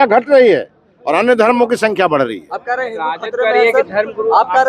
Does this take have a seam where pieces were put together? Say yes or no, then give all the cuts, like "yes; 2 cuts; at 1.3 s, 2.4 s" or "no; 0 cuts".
no; 0 cuts